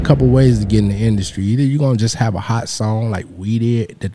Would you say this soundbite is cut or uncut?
uncut